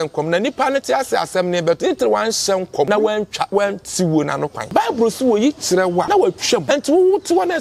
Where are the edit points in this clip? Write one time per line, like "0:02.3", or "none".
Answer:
0:02.9
0:04.6
0:06.2

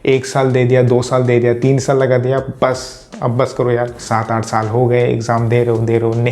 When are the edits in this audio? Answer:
0:04.0

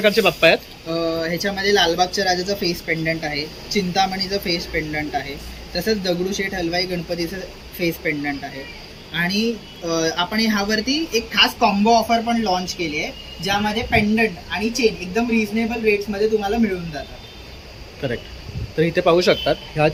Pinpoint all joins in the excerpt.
none

